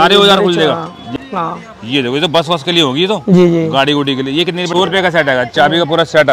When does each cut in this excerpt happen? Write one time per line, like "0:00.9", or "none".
0:01.1
0:04.7